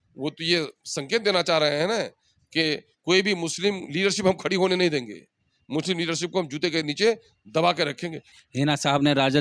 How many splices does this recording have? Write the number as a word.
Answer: one